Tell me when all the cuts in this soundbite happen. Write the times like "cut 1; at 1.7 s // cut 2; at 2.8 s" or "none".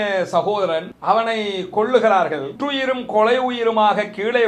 cut 1; at 0.9 s // cut 2; at 2.6 s